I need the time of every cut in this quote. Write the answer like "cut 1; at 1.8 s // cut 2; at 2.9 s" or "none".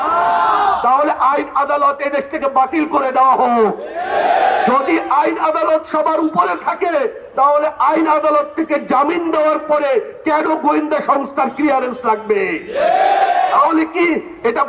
none